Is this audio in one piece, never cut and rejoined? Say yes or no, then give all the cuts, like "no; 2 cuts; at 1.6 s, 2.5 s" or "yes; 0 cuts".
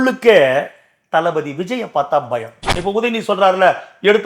no; 1 cut; at 2.7 s